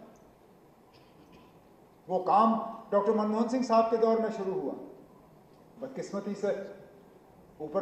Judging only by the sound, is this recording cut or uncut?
uncut